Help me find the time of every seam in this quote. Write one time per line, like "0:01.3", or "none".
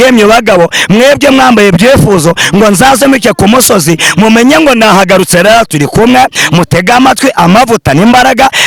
none